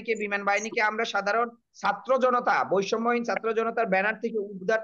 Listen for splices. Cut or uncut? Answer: uncut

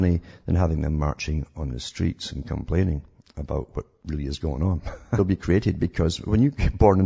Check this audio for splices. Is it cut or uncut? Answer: uncut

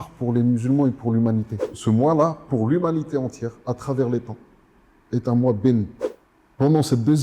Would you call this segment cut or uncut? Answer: cut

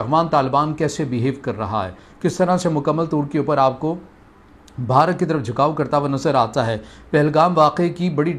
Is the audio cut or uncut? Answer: uncut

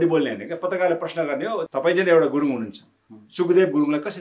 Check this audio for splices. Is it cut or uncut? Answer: cut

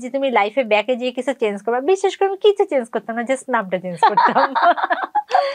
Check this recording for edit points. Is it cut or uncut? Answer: uncut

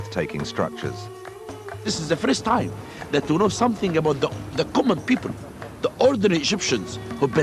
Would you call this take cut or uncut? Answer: cut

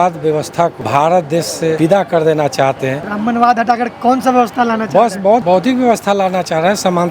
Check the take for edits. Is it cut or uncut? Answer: cut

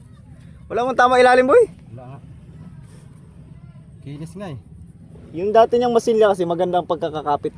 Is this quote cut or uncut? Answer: uncut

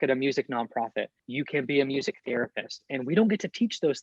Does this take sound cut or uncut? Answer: cut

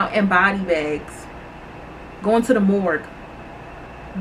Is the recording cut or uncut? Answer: uncut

